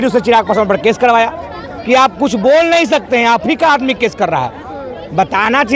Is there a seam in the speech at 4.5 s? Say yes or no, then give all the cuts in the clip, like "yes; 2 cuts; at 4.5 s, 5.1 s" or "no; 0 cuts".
no; 0 cuts